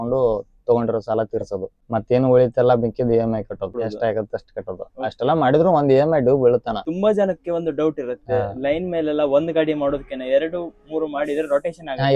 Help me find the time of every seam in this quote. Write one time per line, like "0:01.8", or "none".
0:01.8
0:03.7
0:06.9